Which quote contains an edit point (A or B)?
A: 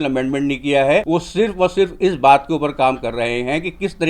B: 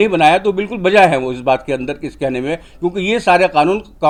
A